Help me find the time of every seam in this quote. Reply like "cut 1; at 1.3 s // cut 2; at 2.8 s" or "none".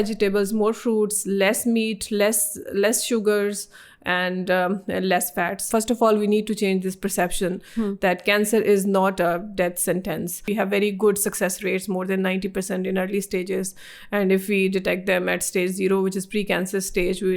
cut 1; at 5.6 s // cut 2; at 10.4 s